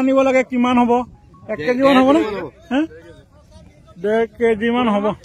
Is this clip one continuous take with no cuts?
yes; 0 cuts

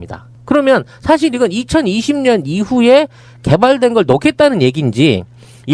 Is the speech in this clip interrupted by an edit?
no; 0 cuts

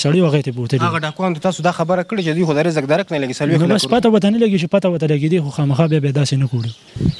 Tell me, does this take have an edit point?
no; 0 cuts

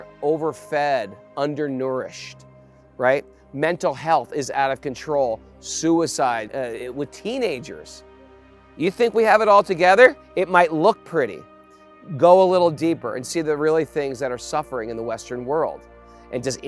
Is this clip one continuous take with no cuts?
no; 1 cut; at 6.5 s

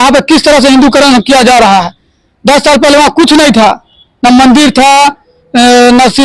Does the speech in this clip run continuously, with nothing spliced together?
yes; 0 cuts

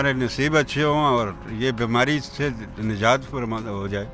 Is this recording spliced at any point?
no; 0 cuts

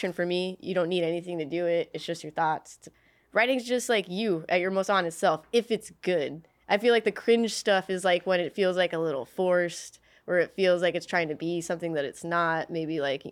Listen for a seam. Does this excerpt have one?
yes; 1 cut; at 2.9 s

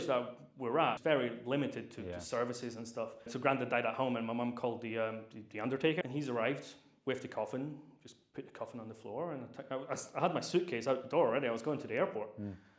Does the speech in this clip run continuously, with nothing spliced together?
no; 3 cuts; at 1.0 s, 3.3 s, 6.0 s

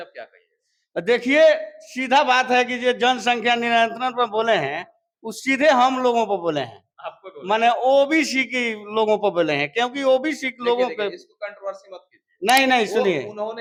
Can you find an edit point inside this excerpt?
no; 0 cuts

